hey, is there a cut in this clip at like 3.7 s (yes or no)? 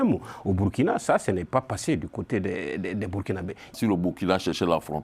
yes